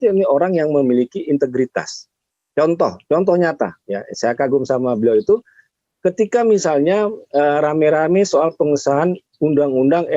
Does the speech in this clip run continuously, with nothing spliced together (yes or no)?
yes